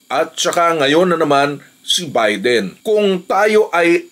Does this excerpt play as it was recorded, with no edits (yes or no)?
no